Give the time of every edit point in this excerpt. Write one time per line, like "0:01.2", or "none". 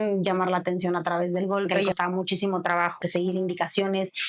0:01.8
0:03.0